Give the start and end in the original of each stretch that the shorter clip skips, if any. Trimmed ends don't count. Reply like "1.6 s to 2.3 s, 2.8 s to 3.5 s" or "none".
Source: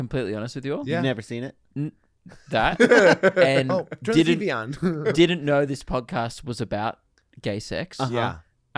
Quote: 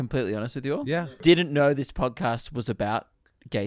1.1 s to 5.0 s